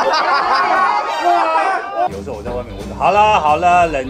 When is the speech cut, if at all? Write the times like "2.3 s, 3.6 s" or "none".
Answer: 2.1 s